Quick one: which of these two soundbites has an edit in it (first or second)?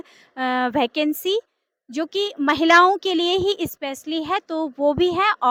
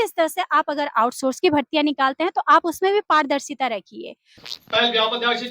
second